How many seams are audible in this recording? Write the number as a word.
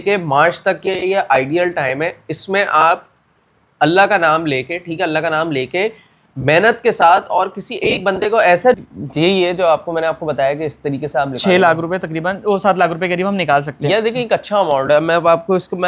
one